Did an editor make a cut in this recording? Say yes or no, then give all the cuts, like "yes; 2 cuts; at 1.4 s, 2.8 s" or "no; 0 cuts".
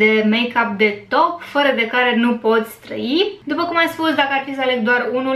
no; 0 cuts